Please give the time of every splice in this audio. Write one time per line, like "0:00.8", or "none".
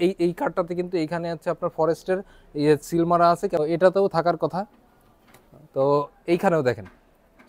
0:03.6